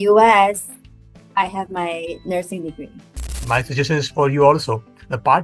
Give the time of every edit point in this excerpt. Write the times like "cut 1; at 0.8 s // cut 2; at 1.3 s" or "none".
cut 1; at 3.4 s